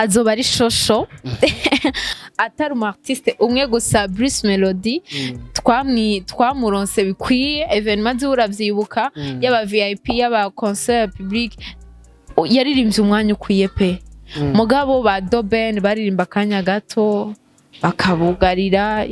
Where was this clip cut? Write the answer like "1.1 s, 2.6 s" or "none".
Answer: 2.2 s

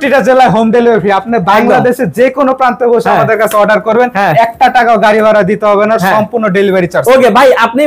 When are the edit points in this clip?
none

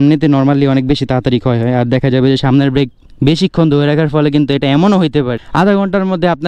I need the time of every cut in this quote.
5.3 s

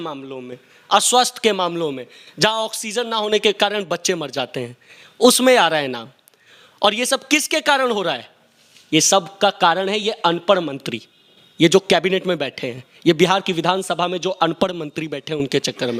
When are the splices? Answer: none

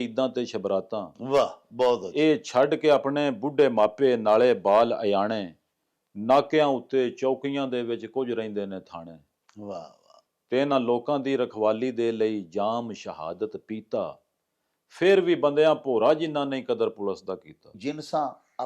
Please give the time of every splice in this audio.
17.7 s

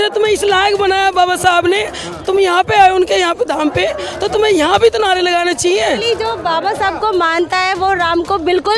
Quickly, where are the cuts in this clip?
6.0 s

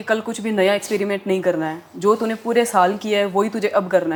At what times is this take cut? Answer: none

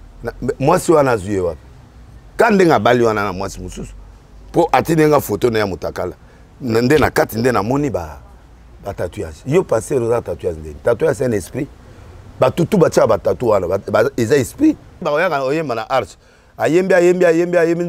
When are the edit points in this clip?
15.0 s

